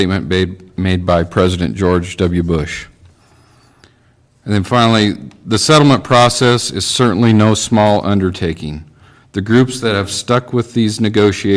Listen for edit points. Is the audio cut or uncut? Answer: uncut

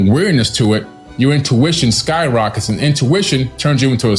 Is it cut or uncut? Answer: uncut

